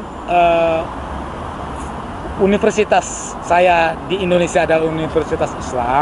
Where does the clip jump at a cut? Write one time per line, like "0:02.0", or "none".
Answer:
none